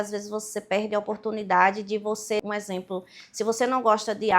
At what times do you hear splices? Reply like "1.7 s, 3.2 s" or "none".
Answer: 2.4 s

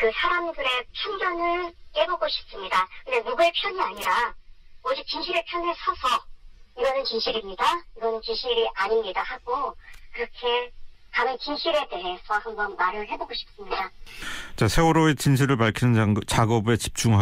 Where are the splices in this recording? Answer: none

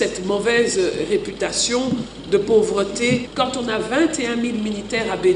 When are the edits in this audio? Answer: 3.3 s

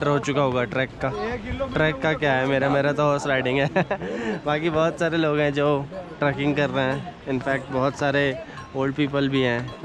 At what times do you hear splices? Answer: none

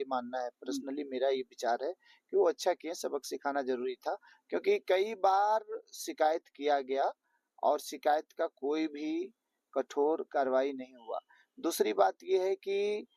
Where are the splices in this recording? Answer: none

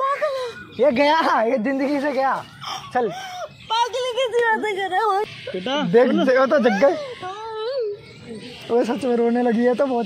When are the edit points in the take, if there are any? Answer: 5.3 s

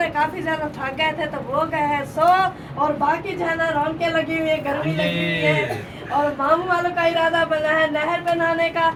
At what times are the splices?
none

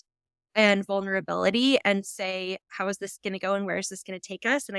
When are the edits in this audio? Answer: 2.7 s

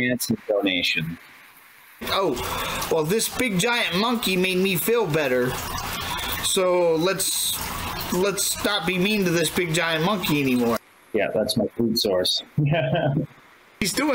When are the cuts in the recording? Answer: 2.1 s

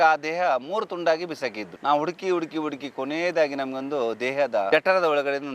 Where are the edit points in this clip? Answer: 1.6 s

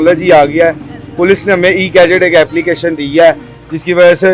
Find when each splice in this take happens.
none

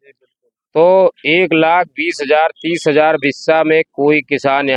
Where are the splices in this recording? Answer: none

